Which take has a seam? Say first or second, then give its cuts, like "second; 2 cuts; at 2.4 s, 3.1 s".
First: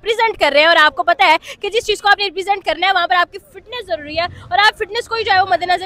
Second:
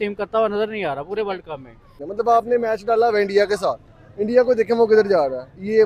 second; 1 cut; at 2.0 s